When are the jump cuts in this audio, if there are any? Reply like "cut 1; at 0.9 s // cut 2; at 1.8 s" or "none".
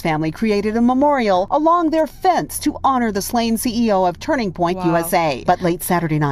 cut 1; at 1.5 s // cut 2; at 5.4 s